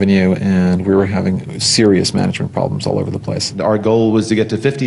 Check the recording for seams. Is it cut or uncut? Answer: cut